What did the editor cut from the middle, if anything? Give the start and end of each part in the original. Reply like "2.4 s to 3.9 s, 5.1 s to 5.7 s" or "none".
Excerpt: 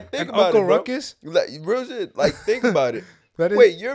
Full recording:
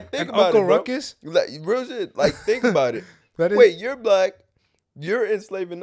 none